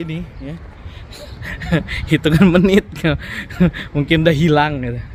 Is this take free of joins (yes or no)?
yes